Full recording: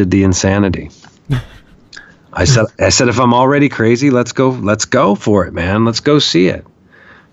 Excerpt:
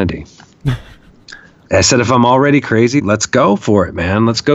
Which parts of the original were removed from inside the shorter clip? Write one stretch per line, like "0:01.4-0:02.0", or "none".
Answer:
0:02.3-0:02.7
0:04.1-0:04.6